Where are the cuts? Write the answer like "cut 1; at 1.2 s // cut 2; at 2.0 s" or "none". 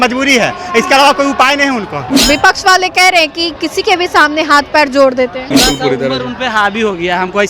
cut 1; at 2.1 s // cut 2; at 5.4 s